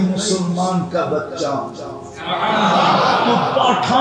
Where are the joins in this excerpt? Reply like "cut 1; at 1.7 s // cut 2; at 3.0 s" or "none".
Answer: none